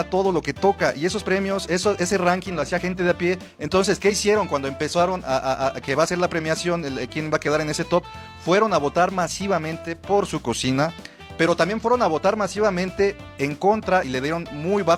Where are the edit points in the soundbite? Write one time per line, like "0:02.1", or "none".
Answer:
none